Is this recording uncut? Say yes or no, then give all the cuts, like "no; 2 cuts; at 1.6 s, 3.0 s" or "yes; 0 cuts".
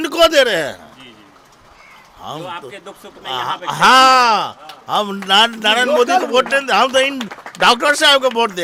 yes; 0 cuts